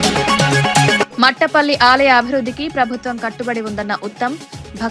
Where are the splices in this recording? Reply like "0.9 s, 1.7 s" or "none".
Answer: 1.1 s